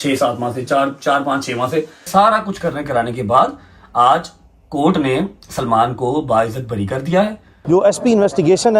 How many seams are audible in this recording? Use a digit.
2